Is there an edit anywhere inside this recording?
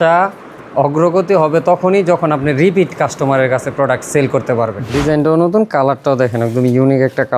yes; 1 cut; at 4.9 s

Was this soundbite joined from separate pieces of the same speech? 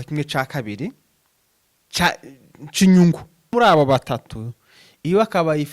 yes; 1 cut; at 3.5 s

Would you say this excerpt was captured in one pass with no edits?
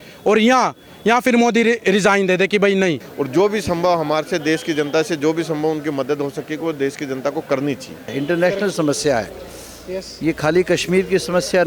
no; 2 cuts; at 3.0 s, 8.1 s

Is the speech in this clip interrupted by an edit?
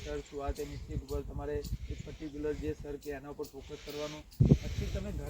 yes; 1 cut; at 4.2 s

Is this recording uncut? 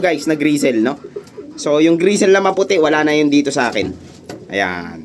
yes; 0 cuts

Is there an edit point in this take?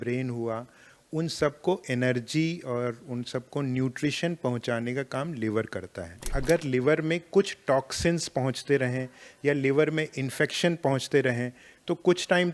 yes; 1 cut; at 6.3 s

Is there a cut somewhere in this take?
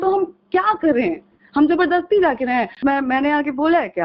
yes; 1 cut; at 2.8 s

